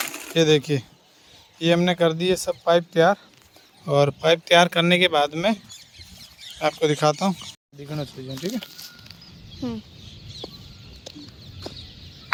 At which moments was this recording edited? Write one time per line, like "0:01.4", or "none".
none